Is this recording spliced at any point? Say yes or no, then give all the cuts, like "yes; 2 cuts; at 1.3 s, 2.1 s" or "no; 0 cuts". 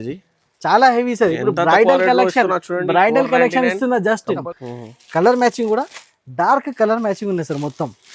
yes; 1 cut; at 4.4 s